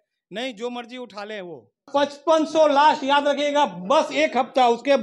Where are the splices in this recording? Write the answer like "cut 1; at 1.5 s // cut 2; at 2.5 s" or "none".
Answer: cut 1; at 1.7 s

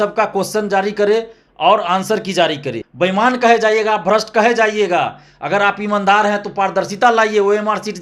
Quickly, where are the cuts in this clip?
cut 1; at 2.8 s

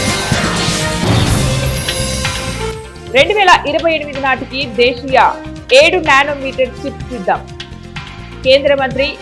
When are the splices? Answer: none

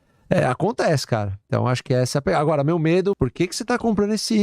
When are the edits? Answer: cut 1; at 3.2 s

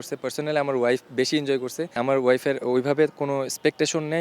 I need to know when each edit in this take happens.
cut 1; at 2.0 s

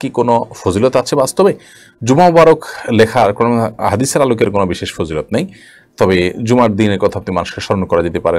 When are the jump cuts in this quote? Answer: none

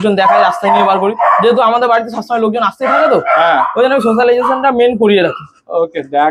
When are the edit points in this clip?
none

